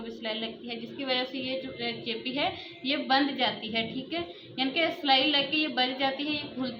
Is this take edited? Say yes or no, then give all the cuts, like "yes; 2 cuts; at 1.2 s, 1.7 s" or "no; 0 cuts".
no; 0 cuts